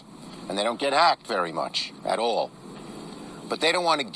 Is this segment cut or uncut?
cut